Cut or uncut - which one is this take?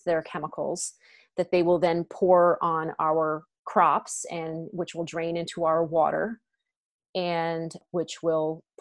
cut